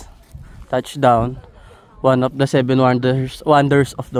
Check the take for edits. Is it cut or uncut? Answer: uncut